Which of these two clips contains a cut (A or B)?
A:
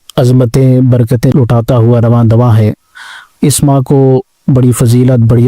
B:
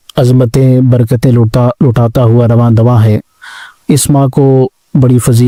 A